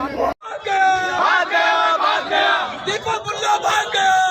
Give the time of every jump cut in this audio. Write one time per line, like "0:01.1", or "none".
none